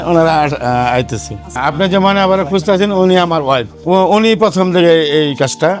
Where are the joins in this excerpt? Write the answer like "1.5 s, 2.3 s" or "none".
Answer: none